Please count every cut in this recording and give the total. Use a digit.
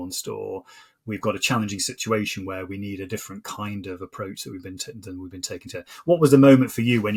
0